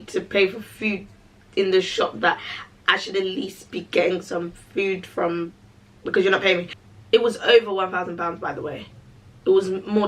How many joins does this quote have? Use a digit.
1